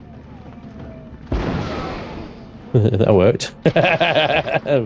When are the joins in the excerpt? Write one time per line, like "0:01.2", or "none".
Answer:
none